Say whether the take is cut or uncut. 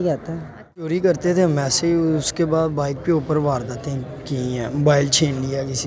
cut